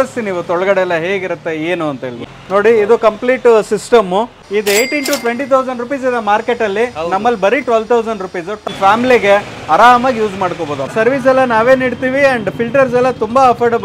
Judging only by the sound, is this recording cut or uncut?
cut